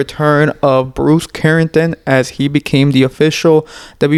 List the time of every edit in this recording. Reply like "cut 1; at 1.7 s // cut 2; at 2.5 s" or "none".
none